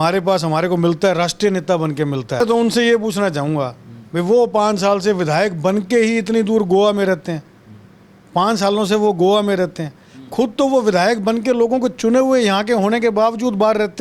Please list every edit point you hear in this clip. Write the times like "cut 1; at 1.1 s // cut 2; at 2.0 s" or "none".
cut 1; at 2.4 s